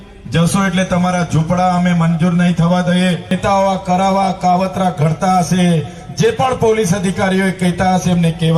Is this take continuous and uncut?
no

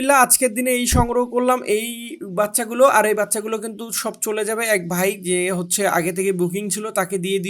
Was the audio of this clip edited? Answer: no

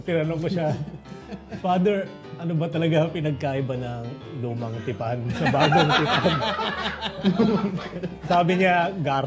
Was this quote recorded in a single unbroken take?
yes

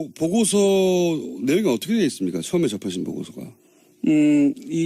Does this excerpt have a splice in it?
yes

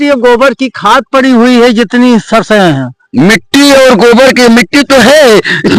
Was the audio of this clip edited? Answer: no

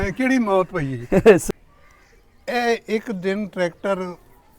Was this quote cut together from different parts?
yes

